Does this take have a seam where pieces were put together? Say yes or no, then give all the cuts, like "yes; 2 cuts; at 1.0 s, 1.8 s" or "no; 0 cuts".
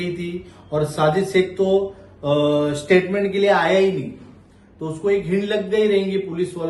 no; 0 cuts